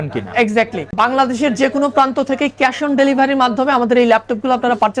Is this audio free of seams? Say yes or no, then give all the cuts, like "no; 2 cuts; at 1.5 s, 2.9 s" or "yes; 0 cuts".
yes; 0 cuts